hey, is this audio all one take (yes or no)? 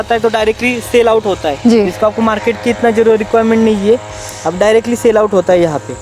yes